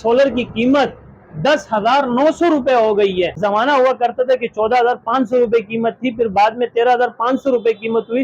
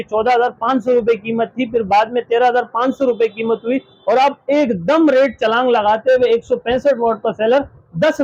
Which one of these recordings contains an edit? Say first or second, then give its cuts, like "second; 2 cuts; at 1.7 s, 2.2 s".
first; 1 cut; at 3.4 s